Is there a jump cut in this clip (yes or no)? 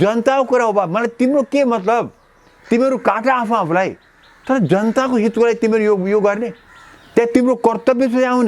no